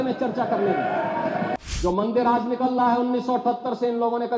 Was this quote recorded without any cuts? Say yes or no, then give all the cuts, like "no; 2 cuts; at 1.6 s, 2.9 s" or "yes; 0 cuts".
no; 1 cut; at 1.5 s